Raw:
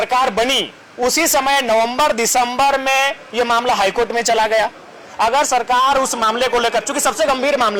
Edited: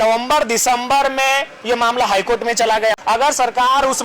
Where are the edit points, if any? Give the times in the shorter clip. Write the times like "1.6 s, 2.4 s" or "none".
3.0 s